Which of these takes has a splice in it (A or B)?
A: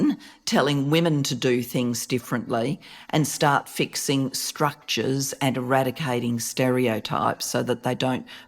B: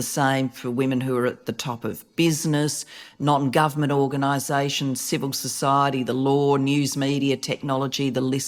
A